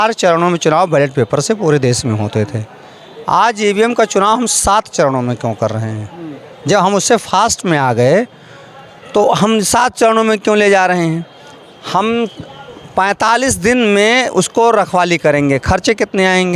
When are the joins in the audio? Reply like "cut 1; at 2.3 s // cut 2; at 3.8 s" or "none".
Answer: none